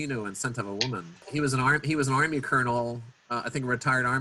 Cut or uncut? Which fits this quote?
cut